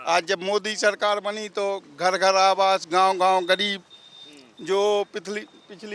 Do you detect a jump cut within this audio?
no; 0 cuts

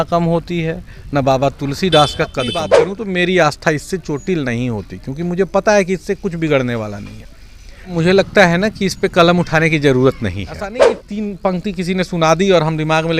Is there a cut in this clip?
yes; 3 cuts; at 2.8 s, 7.9 s, 11.0 s

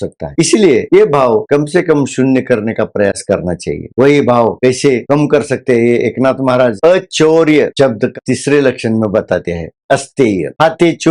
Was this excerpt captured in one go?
yes; 0 cuts

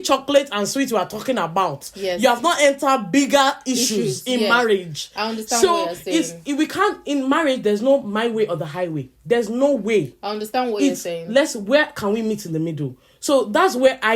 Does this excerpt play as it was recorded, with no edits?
yes; 0 cuts

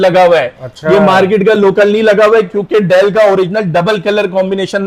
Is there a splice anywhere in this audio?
no; 0 cuts

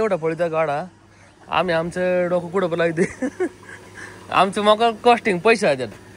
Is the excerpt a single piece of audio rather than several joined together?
yes; 0 cuts

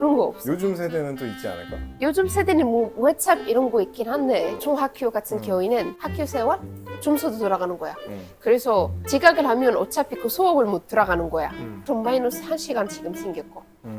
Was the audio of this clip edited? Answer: yes; 2 cuts; at 4.6 s, 11.8 s

